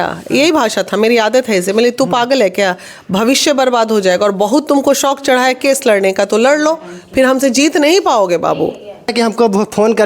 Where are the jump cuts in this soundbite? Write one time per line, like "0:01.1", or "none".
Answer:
0:09.1